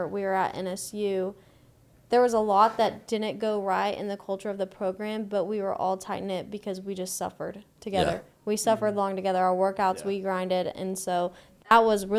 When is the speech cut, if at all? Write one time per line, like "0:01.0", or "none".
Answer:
none